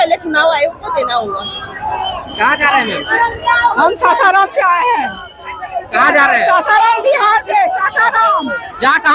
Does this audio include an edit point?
no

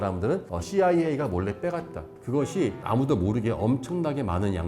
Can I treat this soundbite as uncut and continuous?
no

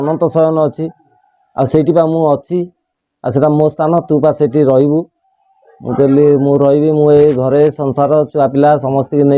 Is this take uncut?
yes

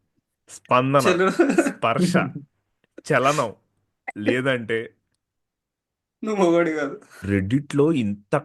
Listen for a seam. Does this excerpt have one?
yes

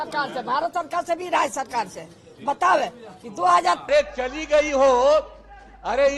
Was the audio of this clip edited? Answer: yes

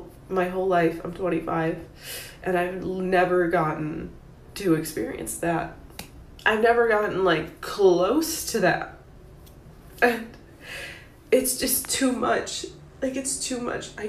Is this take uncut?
yes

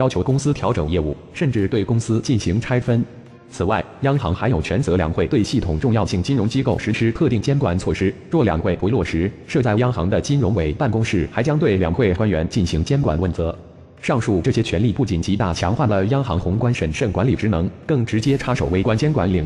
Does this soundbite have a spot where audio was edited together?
no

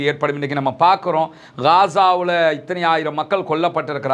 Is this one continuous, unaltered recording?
yes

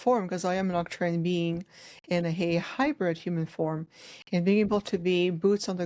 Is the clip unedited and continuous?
yes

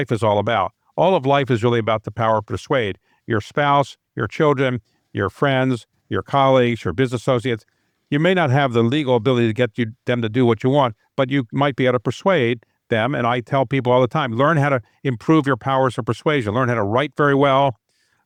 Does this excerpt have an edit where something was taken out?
no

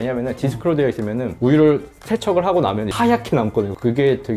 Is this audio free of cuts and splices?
yes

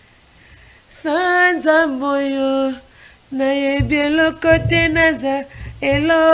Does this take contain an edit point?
no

